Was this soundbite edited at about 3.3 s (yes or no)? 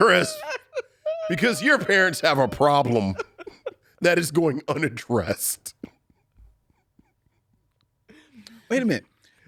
no